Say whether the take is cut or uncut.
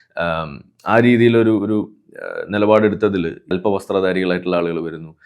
cut